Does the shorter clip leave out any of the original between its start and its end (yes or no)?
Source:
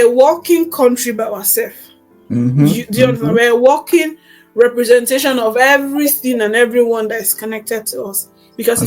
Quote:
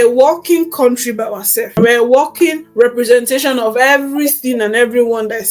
yes